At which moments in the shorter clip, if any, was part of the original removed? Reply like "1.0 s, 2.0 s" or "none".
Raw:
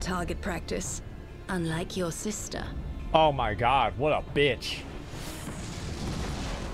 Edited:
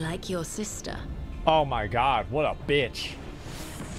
none